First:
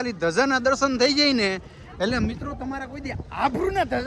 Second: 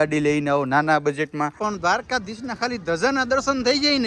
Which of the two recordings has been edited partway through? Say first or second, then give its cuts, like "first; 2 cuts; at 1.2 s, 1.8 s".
second; 1 cut; at 1.5 s